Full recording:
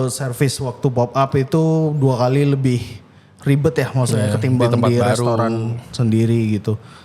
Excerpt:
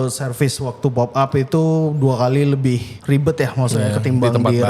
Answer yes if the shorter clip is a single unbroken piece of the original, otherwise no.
no